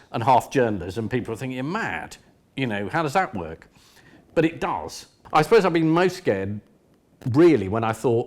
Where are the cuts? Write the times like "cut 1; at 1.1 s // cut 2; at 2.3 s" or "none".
cut 1; at 5.2 s